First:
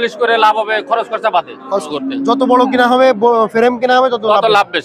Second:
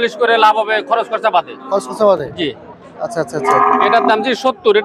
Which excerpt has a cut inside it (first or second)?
first